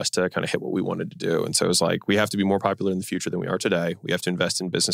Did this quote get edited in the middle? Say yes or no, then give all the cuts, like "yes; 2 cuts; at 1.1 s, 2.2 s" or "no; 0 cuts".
no; 0 cuts